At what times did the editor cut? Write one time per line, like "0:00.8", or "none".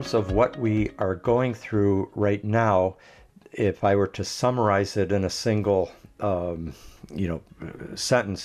none